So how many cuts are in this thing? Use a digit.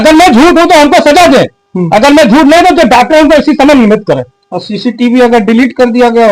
0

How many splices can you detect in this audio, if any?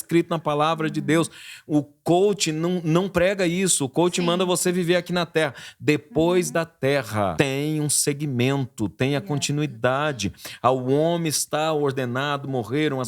1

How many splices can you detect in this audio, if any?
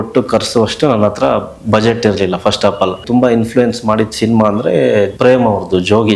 2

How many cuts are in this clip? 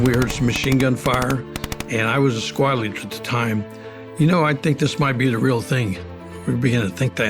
1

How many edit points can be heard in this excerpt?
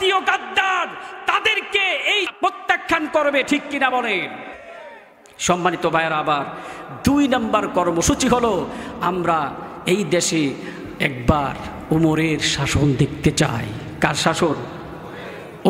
1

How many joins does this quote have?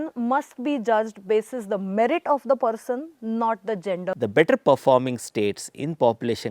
1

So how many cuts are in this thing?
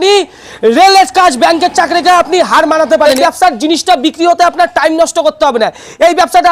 1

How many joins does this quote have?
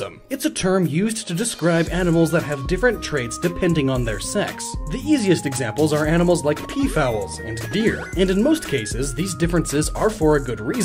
1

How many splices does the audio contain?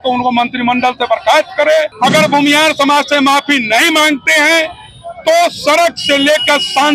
1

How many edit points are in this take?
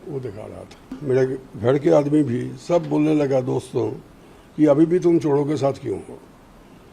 1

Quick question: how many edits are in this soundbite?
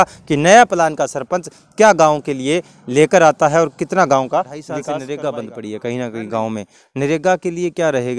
1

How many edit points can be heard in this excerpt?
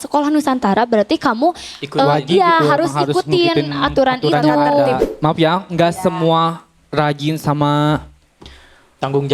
1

